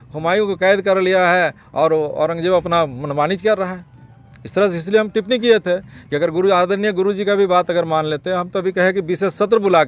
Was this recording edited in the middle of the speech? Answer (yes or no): no